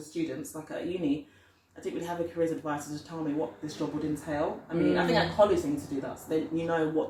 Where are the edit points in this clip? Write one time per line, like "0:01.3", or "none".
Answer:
none